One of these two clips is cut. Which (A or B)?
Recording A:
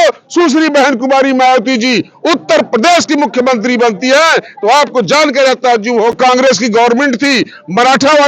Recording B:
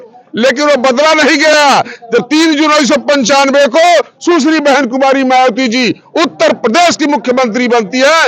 A